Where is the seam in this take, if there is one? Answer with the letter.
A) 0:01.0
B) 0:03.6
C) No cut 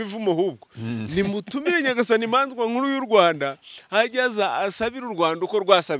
C